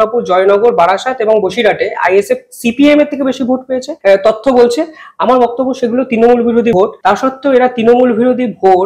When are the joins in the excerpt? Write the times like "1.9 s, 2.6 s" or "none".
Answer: 3.9 s, 6.8 s